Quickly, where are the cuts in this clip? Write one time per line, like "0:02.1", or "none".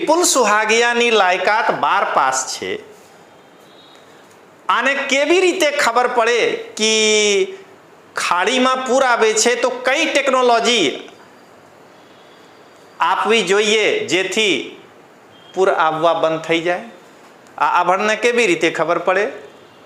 none